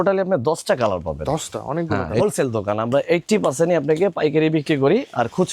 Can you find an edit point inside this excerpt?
yes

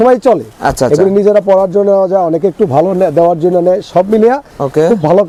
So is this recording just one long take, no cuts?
yes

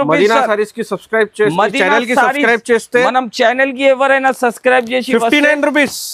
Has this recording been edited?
no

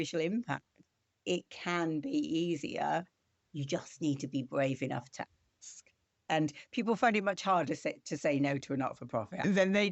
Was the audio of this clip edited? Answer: yes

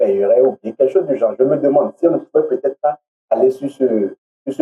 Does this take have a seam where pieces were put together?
no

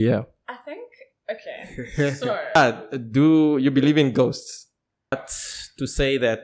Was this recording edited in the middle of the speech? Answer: yes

